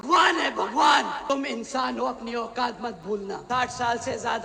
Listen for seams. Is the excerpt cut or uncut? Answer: cut